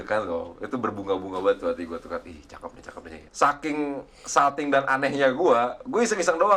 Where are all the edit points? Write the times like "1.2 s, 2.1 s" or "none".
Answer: 3.2 s